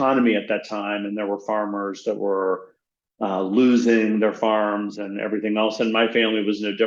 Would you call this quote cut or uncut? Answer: uncut